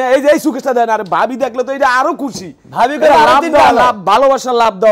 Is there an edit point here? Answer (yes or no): no